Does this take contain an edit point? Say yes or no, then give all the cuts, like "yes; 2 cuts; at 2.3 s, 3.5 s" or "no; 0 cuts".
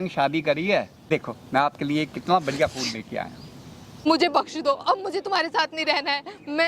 yes; 2 cuts; at 1.1 s, 4.1 s